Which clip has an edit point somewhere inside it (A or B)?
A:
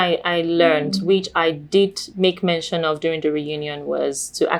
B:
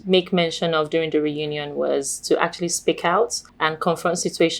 B